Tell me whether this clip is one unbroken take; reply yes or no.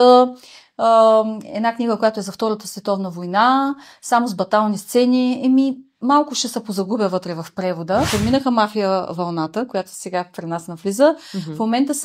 no